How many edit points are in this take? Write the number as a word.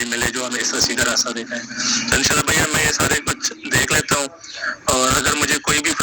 one